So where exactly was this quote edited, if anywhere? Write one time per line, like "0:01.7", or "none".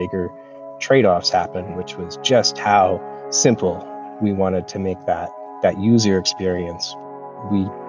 0:06.8